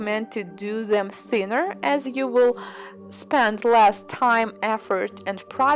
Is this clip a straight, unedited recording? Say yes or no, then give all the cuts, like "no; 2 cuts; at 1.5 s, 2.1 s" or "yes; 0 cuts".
no; 1 cut; at 4.1 s